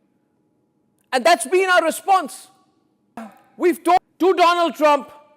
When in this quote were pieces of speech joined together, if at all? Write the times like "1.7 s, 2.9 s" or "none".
4.0 s